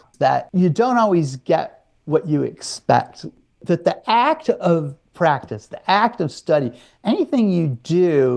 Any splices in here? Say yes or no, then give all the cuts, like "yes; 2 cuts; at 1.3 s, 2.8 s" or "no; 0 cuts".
no; 0 cuts